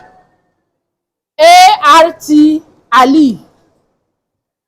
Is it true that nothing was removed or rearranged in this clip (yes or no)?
yes